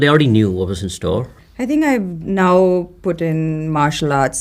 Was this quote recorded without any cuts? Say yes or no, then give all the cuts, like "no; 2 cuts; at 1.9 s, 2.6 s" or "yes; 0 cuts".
no; 1 cut; at 1.4 s